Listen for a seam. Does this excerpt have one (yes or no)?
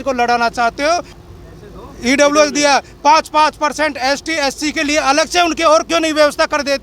yes